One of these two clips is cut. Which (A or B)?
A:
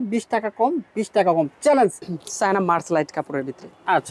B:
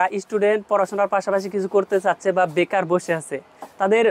A